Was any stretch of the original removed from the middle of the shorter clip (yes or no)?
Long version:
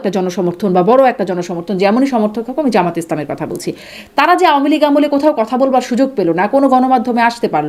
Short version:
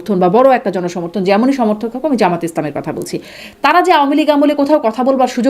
no